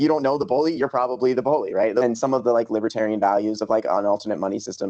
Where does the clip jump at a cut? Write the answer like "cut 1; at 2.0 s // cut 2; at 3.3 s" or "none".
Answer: cut 1; at 1.8 s

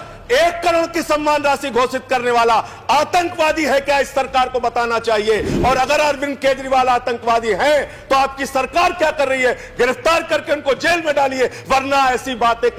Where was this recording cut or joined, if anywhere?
none

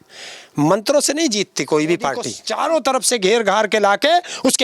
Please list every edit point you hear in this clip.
cut 1; at 2.4 s

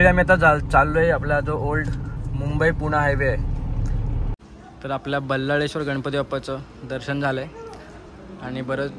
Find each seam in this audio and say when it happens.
cut 1; at 4.4 s

